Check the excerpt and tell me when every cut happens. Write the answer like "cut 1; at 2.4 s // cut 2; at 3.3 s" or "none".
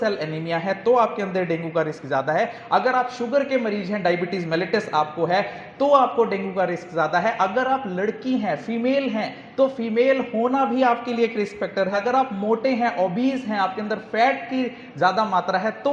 cut 1; at 12.0 s